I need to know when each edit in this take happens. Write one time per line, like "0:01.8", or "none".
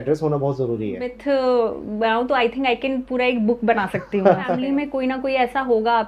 0:01.1
0:04.6